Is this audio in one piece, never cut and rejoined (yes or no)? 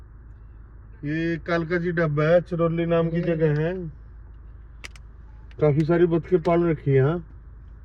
yes